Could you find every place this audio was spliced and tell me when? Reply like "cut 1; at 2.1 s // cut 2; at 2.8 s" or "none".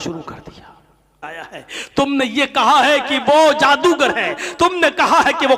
cut 1; at 1.2 s